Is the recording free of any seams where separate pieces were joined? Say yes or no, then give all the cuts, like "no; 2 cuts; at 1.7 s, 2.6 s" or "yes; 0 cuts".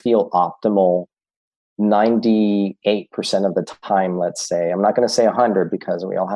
yes; 0 cuts